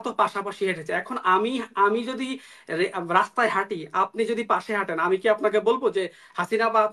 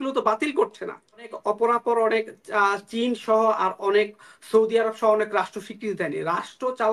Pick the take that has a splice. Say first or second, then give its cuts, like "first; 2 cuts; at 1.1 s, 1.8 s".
second; 1 cut; at 1.3 s